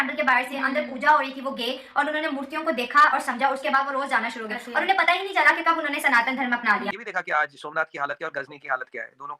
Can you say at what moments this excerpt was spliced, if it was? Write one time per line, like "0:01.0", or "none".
0:07.0